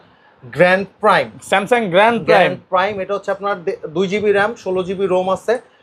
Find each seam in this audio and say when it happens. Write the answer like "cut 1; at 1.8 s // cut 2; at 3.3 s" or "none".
none